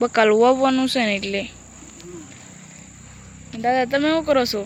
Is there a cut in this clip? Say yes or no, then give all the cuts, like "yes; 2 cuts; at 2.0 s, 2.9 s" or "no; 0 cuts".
no; 0 cuts